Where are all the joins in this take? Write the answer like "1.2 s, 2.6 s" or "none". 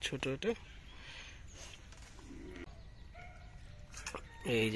2.6 s